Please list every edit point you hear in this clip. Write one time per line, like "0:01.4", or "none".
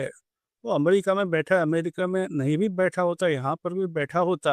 none